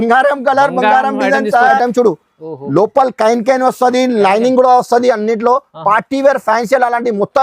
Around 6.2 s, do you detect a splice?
no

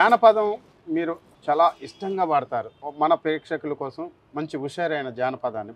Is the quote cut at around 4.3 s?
no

